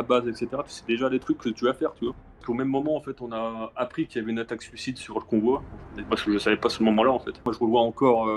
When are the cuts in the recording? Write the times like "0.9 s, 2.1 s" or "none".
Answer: 2.4 s, 7.5 s